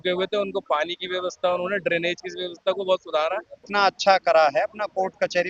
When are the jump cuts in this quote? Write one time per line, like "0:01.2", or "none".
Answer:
0:03.6